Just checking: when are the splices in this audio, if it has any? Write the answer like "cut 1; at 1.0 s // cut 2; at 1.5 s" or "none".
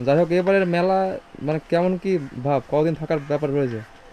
none